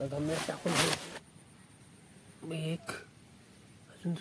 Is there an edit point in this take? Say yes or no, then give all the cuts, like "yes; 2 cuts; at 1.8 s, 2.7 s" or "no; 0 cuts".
yes; 1 cut; at 1.1 s